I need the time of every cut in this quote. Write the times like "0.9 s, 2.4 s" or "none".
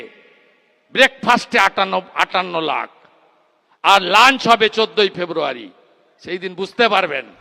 none